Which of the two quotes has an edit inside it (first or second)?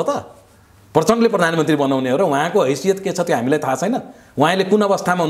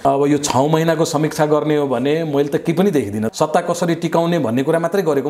second